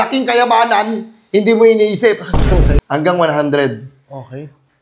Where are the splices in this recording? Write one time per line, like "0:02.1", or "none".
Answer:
0:02.8